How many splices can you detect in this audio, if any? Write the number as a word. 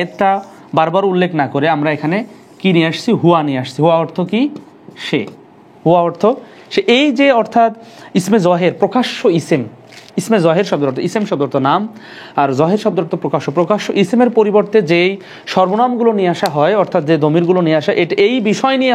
zero